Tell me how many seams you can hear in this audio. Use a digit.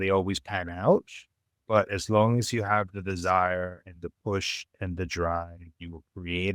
1